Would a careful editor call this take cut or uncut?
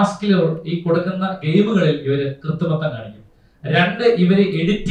uncut